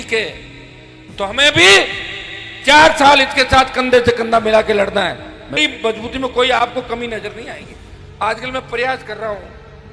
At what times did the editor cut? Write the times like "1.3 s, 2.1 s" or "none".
5.6 s